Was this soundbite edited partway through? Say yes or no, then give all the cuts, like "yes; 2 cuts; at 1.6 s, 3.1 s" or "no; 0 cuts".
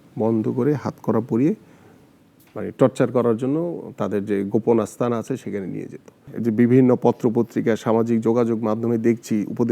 yes; 1 cut; at 6.3 s